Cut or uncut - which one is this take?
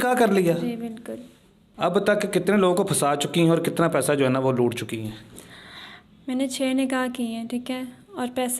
cut